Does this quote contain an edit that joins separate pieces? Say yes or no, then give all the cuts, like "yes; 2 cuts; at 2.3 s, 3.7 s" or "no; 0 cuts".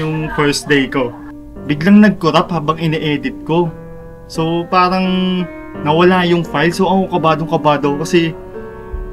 yes; 1 cut; at 1.2 s